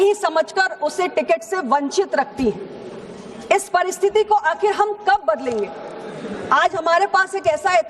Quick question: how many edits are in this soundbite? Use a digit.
1